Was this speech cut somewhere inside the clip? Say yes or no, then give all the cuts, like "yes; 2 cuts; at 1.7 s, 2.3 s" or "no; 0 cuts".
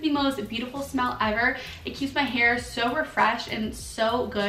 no; 0 cuts